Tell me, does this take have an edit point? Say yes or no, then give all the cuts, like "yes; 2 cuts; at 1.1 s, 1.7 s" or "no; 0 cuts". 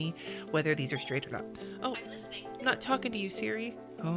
no; 0 cuts